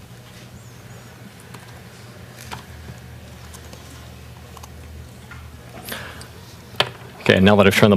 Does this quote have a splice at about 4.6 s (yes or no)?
no